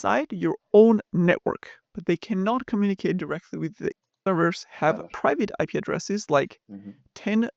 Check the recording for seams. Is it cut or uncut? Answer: cut